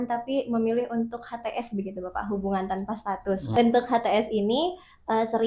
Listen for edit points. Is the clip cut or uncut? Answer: cut